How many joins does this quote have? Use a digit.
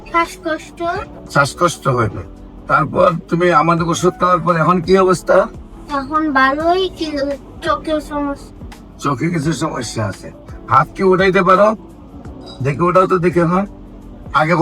1